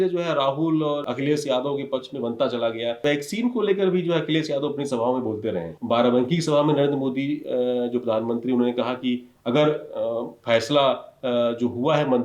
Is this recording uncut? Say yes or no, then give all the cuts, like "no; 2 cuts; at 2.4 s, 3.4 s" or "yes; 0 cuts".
no; 3 cuts; at 1.1 s, 3.0 s, 5.7 s